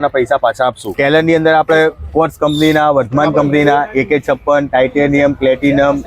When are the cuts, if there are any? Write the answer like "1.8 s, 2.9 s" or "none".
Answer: 0.9 s